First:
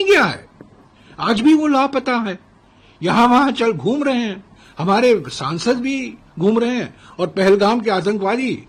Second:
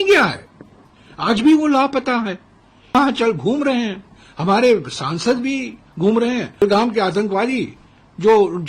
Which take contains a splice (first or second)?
second